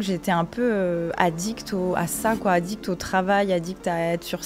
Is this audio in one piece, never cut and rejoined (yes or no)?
yes